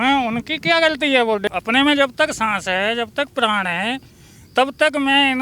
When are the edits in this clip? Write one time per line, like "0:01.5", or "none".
0:01.5